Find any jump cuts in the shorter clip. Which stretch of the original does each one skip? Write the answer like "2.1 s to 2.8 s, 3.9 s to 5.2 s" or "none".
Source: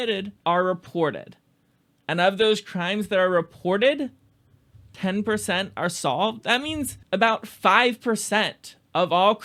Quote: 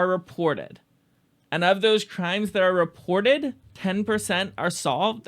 4.2 s to 4.9 s